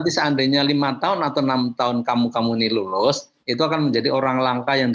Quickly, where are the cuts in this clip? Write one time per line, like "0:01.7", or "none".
none